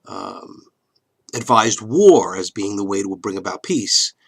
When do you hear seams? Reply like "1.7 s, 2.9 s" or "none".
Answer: 2.5 s